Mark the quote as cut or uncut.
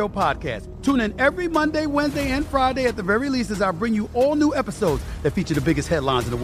uncut